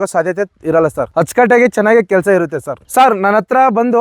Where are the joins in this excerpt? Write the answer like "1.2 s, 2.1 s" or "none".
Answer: none